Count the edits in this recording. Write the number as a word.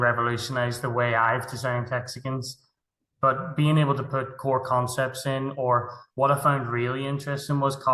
zero